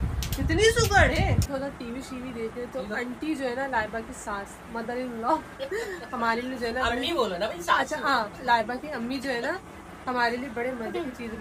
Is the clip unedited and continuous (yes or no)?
no